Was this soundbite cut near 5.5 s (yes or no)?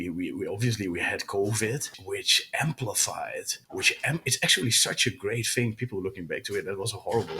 no